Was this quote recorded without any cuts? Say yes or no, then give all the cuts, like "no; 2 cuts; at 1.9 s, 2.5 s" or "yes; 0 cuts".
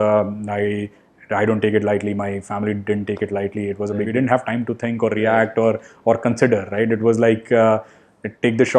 no; 1 cut; at 4.1 s